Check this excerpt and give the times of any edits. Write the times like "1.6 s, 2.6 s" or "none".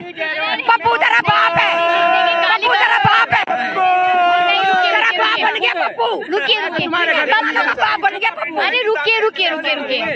none